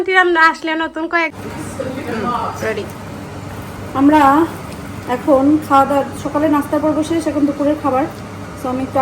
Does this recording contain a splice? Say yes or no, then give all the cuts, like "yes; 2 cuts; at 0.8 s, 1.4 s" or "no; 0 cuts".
yes; 1 cut; at 1.8 s